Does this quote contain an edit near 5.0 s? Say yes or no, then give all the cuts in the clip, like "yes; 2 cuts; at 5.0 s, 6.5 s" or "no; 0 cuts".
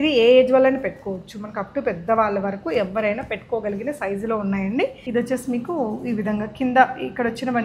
yes; 1 cut; at 5.0 s